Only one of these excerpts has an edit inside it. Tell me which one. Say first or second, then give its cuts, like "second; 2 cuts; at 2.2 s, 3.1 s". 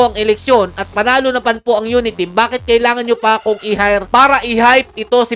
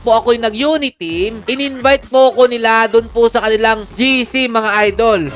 second; 1 cut; at 1.4 s